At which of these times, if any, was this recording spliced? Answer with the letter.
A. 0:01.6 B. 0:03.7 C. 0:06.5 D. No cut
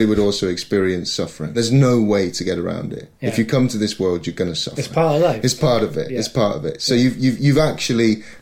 A